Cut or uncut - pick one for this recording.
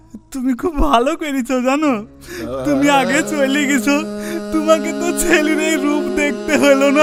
uncut